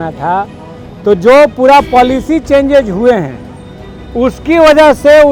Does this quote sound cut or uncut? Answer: uncut